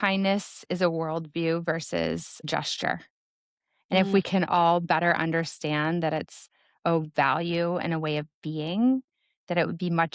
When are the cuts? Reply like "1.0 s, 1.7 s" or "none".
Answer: 2.5 s